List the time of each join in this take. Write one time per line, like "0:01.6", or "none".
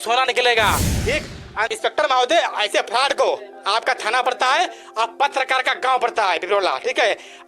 0:01.7